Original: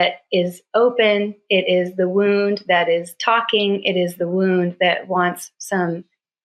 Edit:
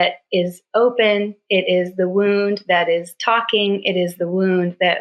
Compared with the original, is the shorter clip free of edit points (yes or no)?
yes